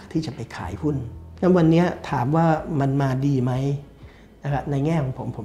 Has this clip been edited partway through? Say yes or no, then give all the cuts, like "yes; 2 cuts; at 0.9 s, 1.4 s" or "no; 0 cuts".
yes; 1 cut; at 1.2 s